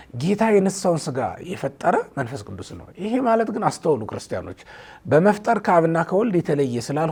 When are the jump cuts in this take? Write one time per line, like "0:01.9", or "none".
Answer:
none